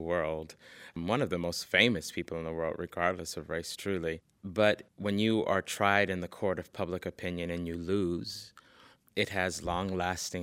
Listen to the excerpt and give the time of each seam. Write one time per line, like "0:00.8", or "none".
0:00.9
0:04.3